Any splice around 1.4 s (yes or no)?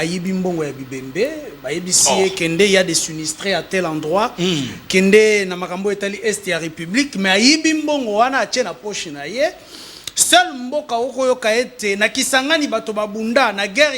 no